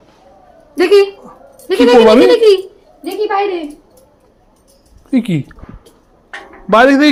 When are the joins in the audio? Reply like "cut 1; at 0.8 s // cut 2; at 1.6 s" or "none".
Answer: none